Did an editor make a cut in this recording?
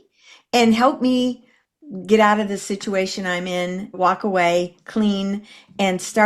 yes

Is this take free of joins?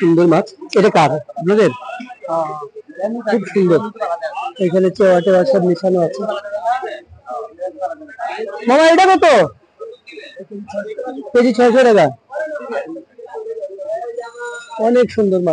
yes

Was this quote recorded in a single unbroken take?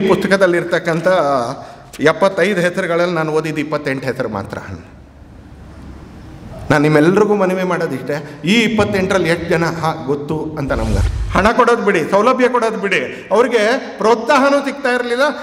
no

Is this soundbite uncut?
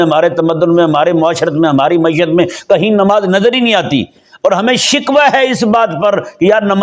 yes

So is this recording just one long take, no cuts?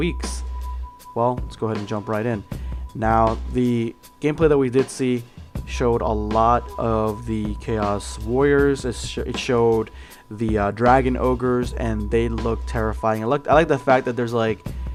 yes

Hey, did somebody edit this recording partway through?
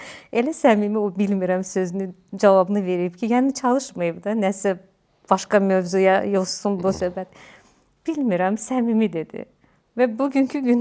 no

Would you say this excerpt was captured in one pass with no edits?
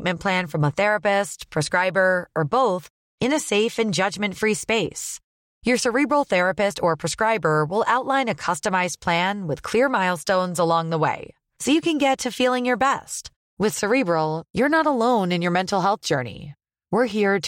yes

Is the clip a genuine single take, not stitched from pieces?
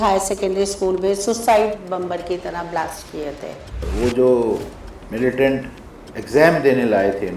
no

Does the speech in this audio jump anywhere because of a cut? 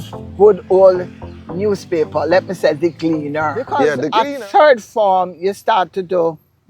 yes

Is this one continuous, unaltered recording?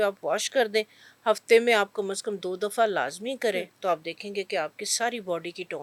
yes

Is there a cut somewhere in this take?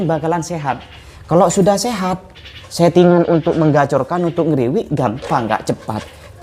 no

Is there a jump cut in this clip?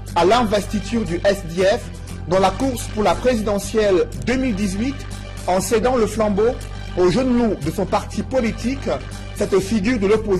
no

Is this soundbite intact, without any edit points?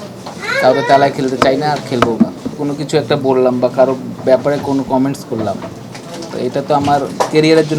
no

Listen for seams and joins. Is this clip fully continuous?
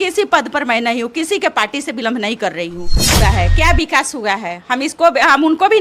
no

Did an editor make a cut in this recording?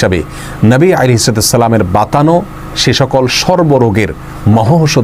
no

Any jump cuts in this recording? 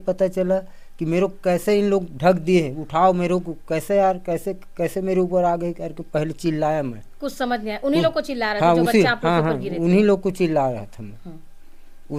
no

